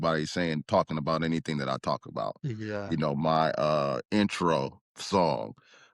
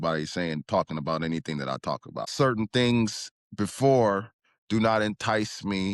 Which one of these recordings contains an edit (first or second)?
second